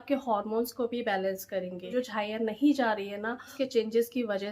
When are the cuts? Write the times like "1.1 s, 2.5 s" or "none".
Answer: 1.9 s, 3.6 s